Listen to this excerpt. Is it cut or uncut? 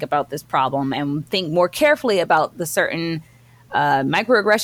uncut